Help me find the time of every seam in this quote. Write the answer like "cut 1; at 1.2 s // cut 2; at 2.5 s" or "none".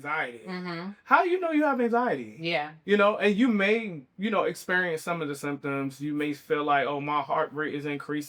none